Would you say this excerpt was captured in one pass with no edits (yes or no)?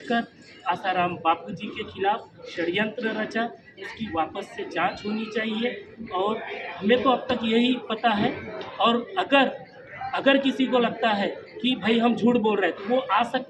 yes